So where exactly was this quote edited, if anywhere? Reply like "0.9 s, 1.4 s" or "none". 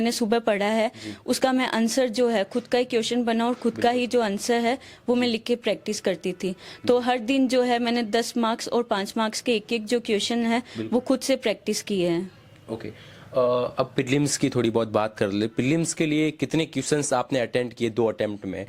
none